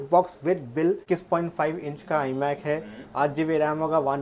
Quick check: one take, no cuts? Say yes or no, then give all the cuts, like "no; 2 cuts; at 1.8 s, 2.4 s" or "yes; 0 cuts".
no; 1 cut; at 1.0 s